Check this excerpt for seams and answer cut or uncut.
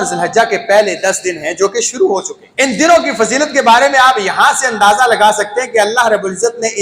cut